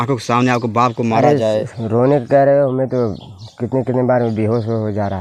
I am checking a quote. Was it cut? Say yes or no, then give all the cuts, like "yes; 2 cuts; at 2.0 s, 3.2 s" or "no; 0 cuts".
no; 0 cuts